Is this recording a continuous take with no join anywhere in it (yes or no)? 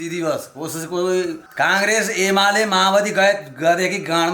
no